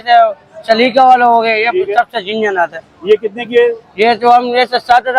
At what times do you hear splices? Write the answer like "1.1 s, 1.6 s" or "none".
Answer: none